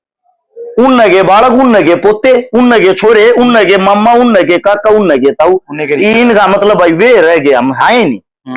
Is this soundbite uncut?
yes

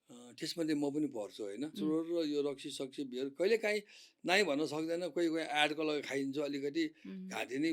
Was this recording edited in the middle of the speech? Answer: yes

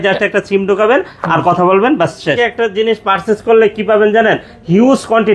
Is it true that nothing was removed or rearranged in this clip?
no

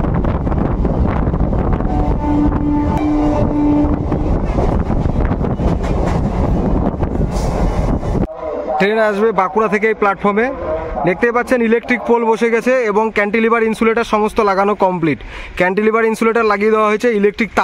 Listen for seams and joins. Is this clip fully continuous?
no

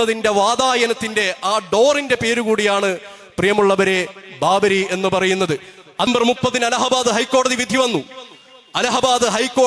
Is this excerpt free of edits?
no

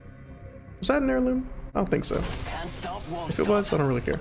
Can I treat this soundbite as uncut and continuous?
no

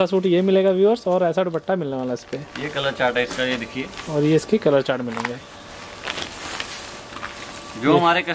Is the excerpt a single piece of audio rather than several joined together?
yes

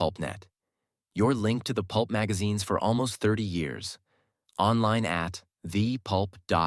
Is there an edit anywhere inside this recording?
no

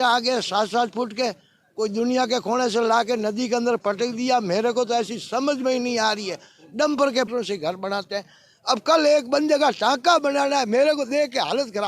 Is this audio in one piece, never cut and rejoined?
no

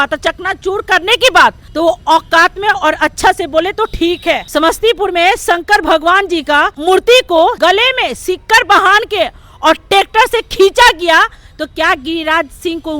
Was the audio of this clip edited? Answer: yes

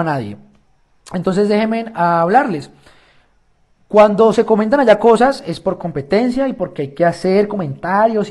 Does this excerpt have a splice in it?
yes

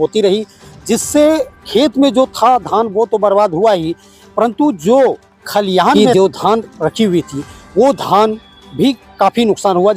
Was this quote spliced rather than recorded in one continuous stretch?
yes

